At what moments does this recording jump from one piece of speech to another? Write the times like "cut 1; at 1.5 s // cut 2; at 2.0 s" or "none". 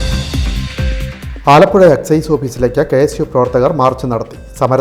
cut 1; at 1.1 s